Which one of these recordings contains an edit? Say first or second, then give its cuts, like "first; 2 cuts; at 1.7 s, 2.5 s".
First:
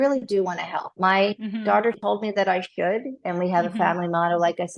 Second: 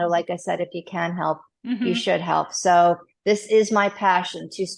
first; 1 cut; at 2.0 s